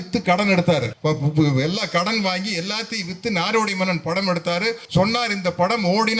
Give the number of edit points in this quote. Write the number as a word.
two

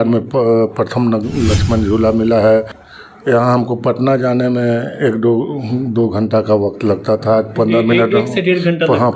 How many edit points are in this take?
one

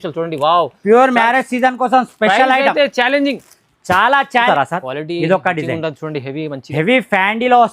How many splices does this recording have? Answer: one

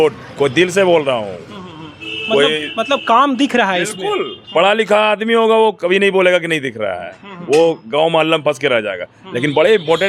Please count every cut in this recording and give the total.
zero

